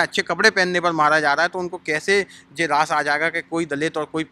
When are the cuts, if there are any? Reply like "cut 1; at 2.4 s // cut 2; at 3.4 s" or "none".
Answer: none

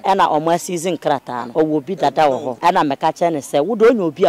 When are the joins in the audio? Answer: cut 1; at 1.4 s // cut 2; at 2.5 s

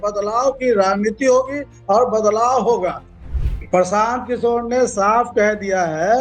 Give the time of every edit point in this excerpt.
cut 1; at 3.2 s

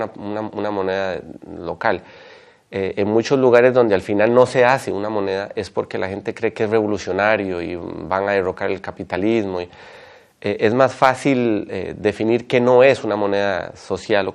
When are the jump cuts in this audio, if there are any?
none

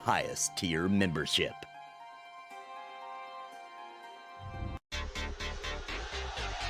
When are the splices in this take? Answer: none

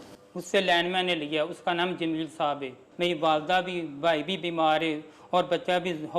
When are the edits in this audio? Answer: cut 1; at 2.8 s

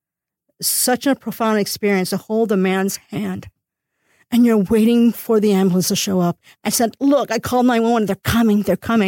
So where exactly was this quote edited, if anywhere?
cut 1; at 6.5 s

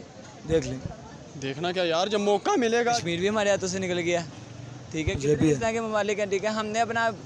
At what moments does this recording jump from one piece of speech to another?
cut 1; at 2.9 s

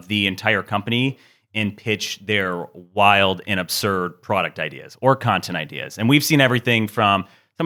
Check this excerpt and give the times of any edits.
none

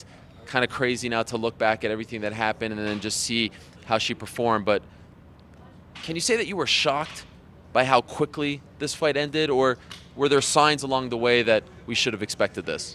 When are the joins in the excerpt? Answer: none

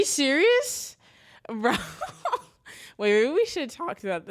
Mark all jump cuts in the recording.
none

